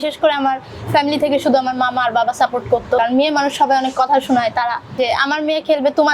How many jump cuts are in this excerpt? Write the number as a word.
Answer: two